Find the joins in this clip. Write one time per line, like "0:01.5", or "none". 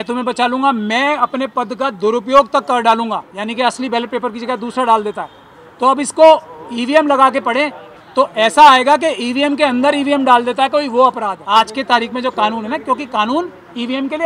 0:03.3
0:11.4